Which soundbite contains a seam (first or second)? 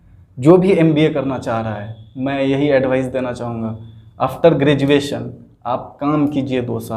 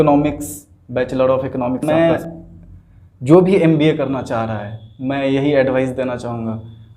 second